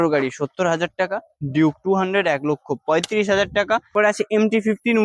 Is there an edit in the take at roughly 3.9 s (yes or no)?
yes